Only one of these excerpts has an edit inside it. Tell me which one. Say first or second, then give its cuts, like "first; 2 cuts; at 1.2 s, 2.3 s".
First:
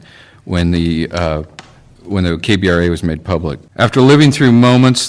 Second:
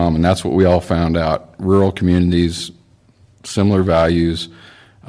first; 1 cut; at 3.6 s